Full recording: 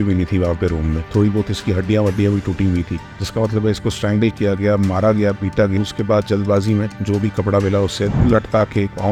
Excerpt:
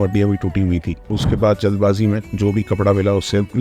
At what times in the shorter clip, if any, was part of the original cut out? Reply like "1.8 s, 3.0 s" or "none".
1.2 s